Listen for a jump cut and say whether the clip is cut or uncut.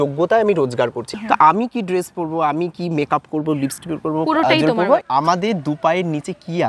cut